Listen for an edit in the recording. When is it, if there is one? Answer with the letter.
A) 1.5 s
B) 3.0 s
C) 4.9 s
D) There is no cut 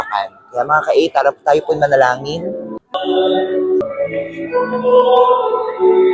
B